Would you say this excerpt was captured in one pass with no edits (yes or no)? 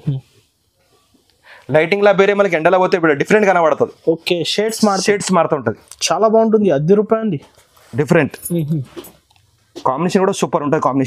yes